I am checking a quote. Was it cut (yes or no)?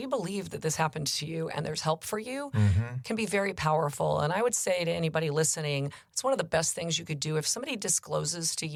no